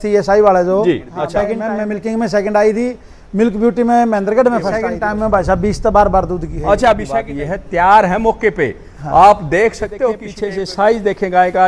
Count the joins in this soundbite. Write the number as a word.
four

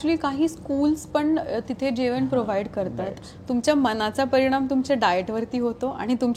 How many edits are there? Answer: one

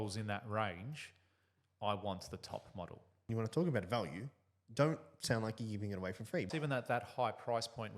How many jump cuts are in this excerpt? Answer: two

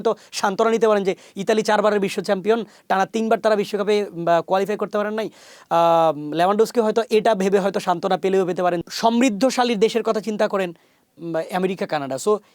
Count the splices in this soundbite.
one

